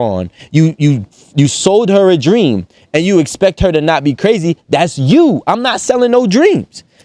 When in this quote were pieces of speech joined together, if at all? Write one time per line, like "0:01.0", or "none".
none